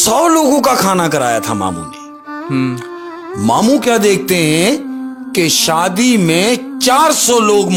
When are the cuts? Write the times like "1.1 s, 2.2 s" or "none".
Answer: none